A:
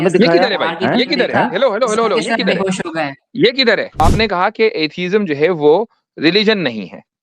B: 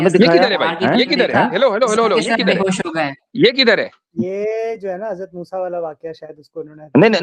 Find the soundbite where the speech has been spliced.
A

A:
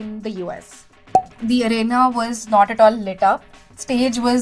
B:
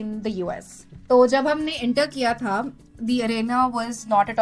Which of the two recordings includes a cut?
A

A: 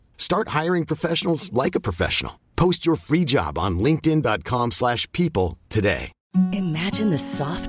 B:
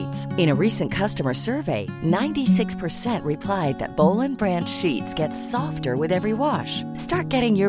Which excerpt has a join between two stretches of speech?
A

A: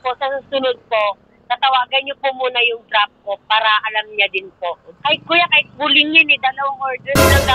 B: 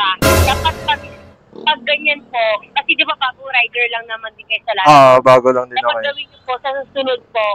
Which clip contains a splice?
A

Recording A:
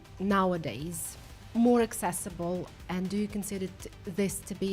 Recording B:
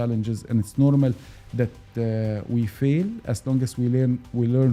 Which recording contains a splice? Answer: A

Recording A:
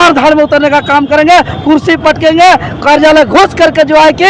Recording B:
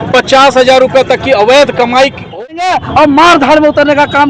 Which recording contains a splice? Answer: B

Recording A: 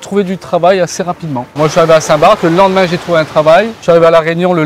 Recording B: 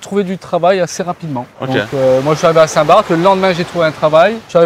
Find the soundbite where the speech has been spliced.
A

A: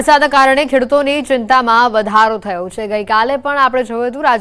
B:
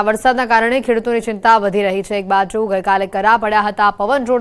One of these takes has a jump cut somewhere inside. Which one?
A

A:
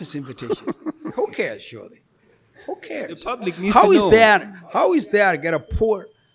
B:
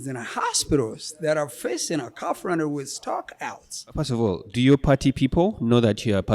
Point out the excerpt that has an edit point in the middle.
B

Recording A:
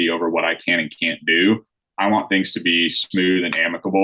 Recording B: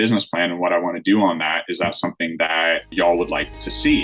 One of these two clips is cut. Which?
B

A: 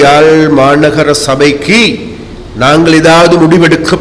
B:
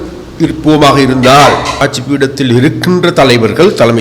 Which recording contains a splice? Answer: B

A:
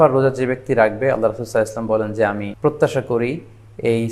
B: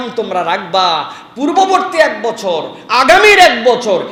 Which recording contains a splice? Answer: A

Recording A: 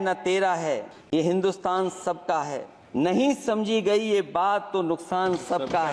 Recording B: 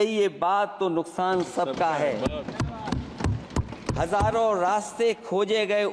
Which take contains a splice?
A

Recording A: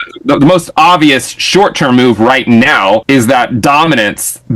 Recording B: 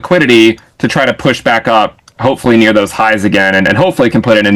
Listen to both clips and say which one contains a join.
A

